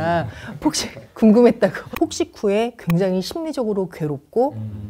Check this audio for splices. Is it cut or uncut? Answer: cut